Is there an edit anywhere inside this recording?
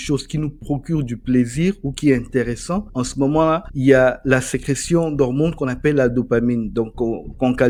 no; 0 cuts

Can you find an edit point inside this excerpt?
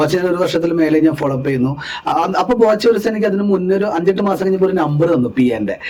no; 0 cuts

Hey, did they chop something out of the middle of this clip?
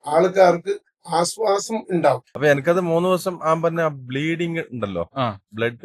yes; 1 cut; at 2.3 s

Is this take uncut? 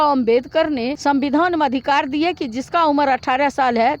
no; 1 cut; at 0.9 s

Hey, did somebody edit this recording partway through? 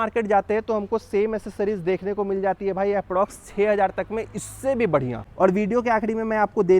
yes; 1 cut; at 5.4 s

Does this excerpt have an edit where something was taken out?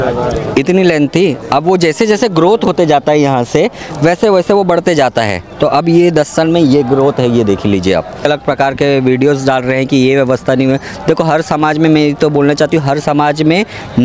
yes; 1 cut; at 8.2 s

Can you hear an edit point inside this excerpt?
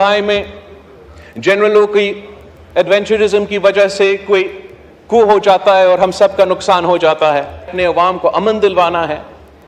yes; 1 cut; at 7.7 s

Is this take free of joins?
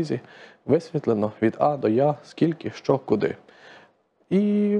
yes; 0 cuts

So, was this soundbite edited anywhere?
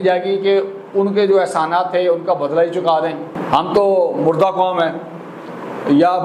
no; 0 cuts

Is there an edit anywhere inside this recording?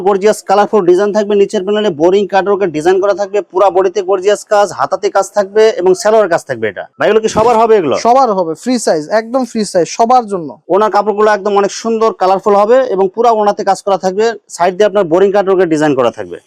no; 0 cuts

